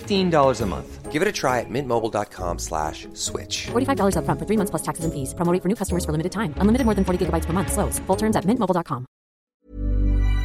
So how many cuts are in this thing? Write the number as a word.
one